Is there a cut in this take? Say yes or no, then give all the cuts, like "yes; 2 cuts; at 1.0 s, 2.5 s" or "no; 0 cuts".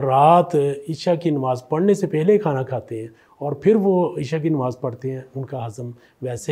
no; 0 cuts